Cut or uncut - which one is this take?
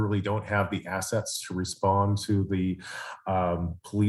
uncut